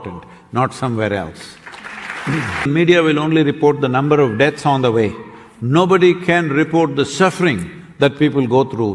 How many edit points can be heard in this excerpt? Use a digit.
1